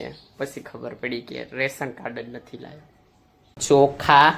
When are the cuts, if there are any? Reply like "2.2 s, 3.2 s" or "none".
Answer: 3.5 s